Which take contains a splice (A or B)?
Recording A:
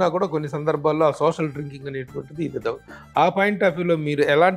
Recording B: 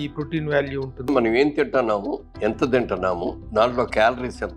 B